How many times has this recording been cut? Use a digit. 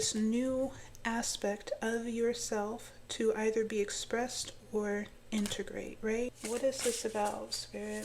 1